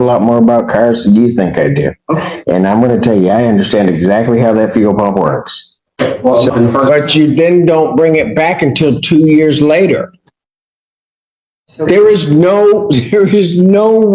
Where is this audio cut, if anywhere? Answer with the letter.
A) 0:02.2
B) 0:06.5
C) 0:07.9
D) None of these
B